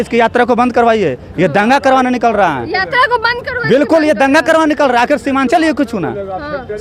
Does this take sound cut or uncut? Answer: uncut